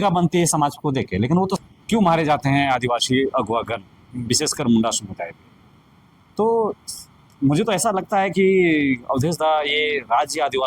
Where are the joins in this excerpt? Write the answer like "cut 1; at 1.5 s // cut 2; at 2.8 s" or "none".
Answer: cut 1; at 1.6 s

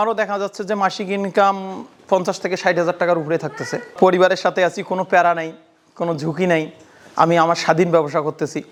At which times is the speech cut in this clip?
none

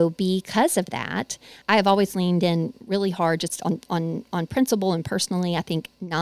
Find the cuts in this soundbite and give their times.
cut 1; at 1.6 s

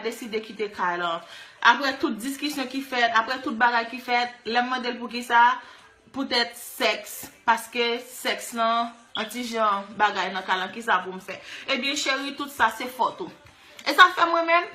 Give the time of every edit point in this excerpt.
cut 1; at 11.1 s

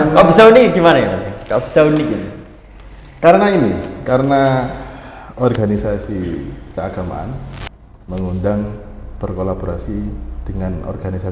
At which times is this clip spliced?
none

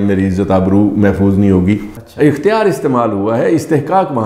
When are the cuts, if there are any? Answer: cut 1; at 2.0 s

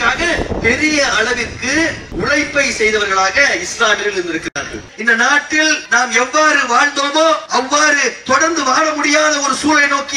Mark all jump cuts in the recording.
cut 1; at 2.0 s // cut 2; at 4.9 s // cut 3; at 5.8 s // cut 4; at 7.4 s

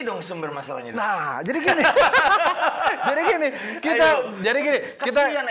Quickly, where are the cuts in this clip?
none

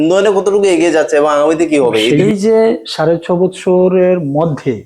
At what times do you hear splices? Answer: cut 1; at 2.2 s

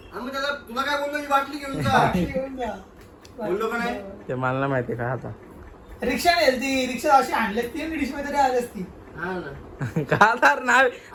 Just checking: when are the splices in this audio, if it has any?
none

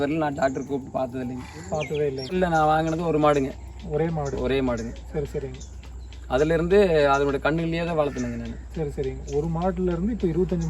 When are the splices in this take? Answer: cut 1; at 2.3 s

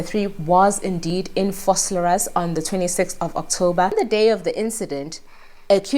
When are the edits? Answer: cut 1; at 3.9 s

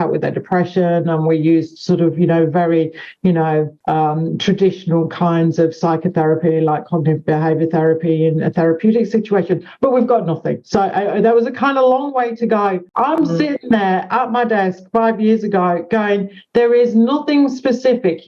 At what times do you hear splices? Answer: cut 1; at 12.9 s

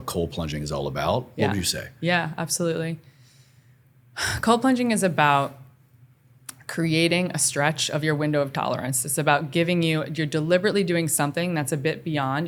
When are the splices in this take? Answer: none

